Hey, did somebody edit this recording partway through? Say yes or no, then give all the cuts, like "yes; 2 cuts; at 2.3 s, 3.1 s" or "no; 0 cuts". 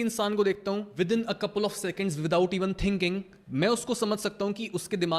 yes; 2 cuts; at 0.9 s, 3.4 s